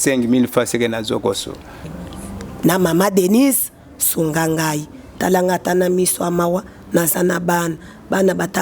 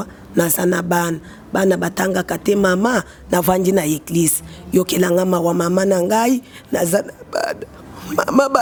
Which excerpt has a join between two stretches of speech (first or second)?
first